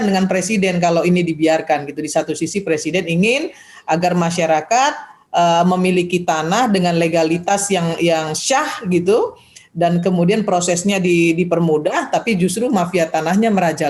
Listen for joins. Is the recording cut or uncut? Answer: uncut